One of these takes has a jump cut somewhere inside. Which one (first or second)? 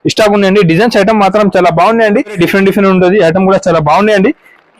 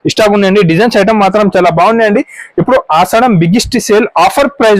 first